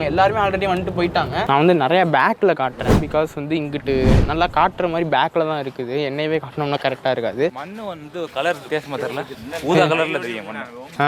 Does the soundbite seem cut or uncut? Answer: cut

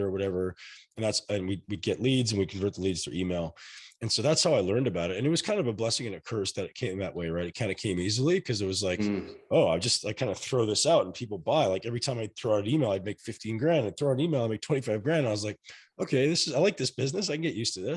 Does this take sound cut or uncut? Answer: uncut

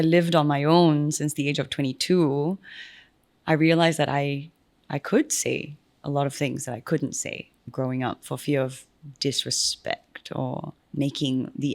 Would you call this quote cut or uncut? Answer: cut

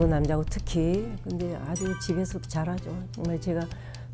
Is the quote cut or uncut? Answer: uncut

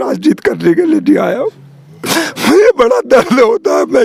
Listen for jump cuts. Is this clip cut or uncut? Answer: uncut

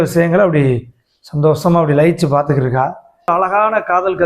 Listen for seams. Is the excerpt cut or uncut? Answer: cut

